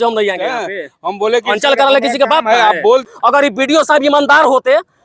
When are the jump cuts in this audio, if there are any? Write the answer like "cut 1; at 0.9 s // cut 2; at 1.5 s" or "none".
cut 1; at 3.1 s